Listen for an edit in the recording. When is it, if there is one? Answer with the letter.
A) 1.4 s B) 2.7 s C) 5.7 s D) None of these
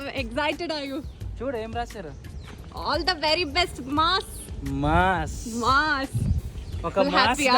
A